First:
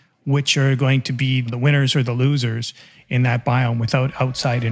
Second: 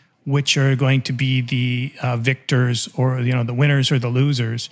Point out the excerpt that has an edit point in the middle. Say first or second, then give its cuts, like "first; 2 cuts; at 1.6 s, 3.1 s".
first; 1 cut; at 1.5 s